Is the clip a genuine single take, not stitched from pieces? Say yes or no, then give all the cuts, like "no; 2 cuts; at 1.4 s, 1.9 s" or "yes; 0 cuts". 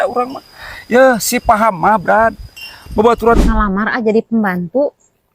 no; 1 cut; at 3.4 s